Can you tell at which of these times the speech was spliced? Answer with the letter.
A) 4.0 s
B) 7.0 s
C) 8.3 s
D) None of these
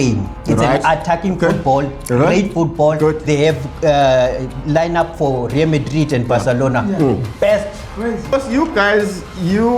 C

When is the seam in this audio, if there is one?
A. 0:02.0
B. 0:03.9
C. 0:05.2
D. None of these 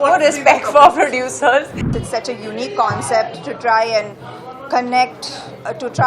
A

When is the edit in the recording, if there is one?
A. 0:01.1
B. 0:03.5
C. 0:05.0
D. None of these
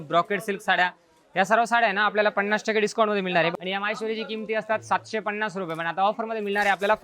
B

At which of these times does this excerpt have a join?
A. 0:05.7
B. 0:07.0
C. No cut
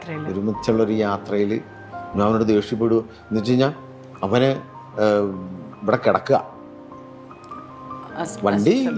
C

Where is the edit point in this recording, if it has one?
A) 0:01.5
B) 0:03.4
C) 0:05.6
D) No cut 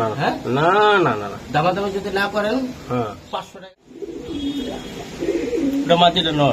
B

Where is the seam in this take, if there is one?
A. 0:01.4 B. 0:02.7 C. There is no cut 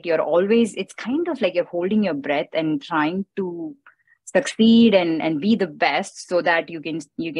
C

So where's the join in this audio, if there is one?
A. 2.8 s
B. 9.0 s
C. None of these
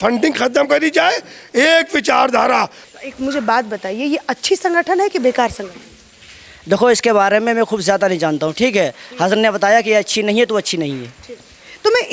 A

